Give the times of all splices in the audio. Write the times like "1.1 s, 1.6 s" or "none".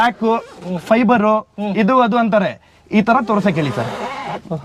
none